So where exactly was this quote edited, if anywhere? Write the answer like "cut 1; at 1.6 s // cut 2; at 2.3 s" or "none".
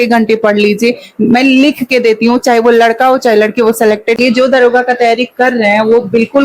cut 1; at 4.2 s